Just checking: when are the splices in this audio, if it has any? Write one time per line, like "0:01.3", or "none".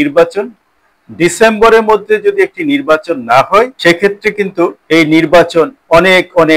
0:03.7
0:04.8